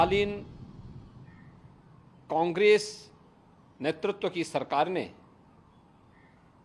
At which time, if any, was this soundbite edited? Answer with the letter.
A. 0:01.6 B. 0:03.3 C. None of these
C